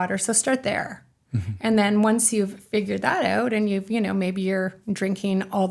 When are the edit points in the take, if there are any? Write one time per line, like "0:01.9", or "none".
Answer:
none